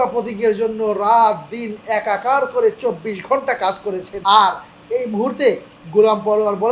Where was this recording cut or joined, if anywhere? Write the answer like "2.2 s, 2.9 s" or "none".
4.1 s